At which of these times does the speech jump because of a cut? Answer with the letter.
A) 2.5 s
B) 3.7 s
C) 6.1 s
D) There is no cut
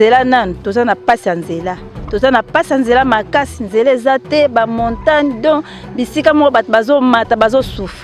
D